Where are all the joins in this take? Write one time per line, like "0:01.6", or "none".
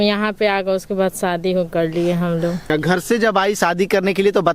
0:02.6